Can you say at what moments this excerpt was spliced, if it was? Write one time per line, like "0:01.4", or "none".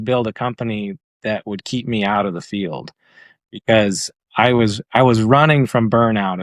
none